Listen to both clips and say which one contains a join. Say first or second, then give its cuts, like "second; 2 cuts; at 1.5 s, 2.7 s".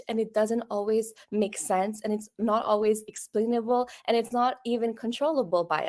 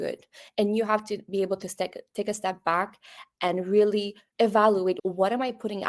second; 2 cuts; at 4.2 s, 5.0 s